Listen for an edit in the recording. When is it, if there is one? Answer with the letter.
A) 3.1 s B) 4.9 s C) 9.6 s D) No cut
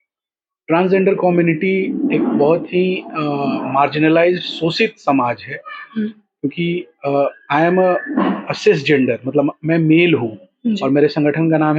D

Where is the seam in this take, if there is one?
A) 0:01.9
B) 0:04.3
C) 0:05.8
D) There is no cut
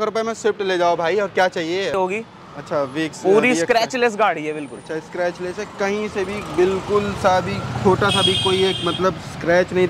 A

